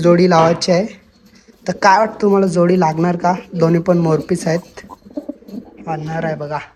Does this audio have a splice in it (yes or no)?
no